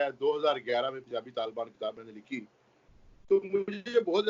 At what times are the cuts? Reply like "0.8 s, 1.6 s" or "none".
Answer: none